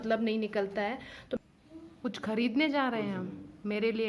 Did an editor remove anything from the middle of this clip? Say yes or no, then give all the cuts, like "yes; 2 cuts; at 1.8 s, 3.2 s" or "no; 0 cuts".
yes; 1 cut; at 1.4 s